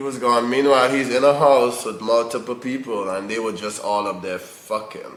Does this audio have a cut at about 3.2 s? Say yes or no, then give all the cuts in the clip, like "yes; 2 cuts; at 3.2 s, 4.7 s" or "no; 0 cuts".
no; 0 cuts